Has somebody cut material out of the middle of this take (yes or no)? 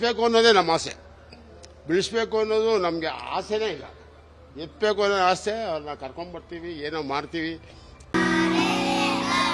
no